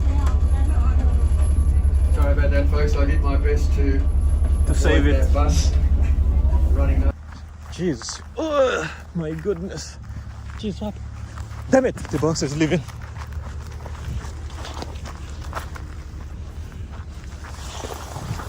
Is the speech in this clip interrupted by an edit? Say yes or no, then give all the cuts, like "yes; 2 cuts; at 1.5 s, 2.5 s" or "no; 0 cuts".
yes; 1 cut; at 7.1 s